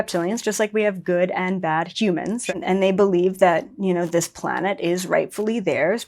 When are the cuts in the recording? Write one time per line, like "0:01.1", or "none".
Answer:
0:02.4